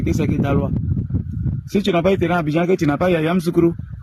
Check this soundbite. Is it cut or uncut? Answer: uncut